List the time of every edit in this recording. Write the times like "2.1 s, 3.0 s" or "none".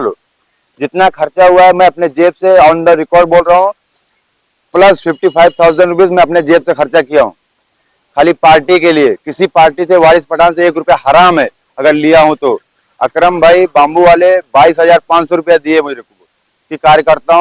none

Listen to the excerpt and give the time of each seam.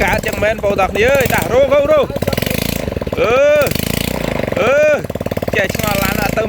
none

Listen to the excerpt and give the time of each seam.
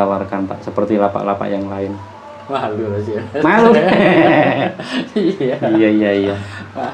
none

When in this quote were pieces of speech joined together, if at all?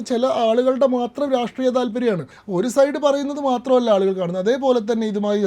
2.3 s

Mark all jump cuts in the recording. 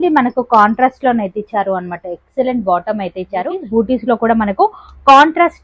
3.6 s

